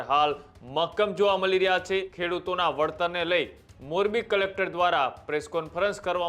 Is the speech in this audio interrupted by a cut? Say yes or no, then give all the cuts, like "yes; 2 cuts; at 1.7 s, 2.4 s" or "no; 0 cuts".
yes; 1 cut; at 2.1 s